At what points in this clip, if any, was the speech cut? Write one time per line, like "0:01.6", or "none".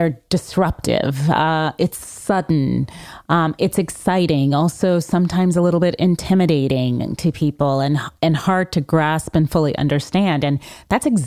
none